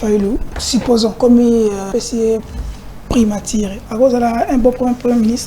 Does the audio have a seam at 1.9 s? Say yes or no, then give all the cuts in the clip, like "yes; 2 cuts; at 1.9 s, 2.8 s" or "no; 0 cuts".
yes; 2 cuts; at 1.0 s, 1.9 s